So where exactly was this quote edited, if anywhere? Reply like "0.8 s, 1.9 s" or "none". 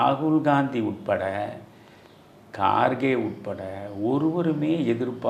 none